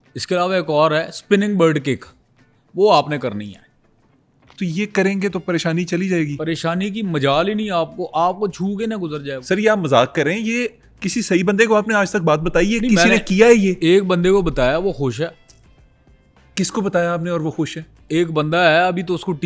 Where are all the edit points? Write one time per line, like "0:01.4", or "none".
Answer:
none